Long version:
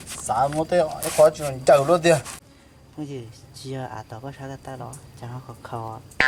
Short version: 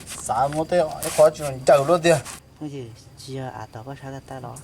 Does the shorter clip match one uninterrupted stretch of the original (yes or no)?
no